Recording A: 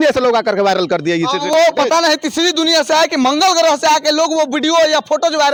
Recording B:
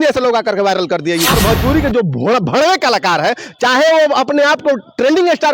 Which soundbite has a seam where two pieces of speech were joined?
B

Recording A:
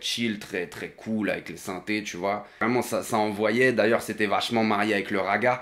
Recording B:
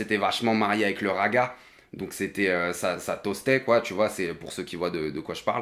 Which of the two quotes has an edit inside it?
A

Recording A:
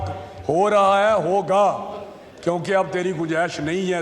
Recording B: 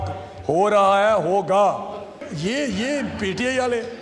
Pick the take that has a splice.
B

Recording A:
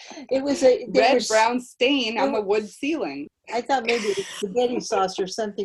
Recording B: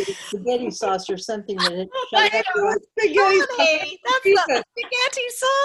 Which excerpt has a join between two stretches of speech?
A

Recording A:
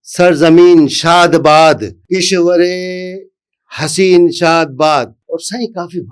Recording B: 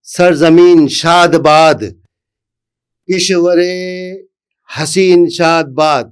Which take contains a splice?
A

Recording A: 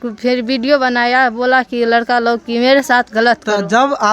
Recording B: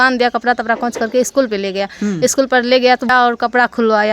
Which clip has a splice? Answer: B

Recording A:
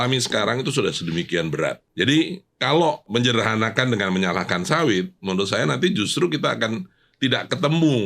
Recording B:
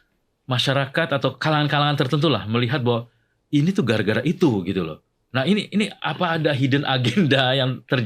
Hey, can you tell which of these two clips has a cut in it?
A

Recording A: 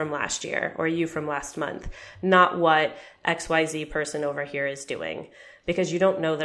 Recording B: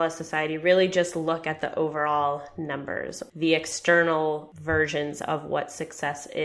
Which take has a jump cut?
B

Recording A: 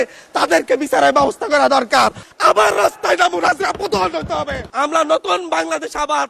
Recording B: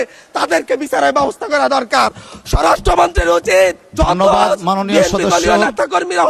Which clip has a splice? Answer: A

